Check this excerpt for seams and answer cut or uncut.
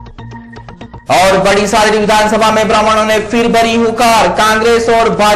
cut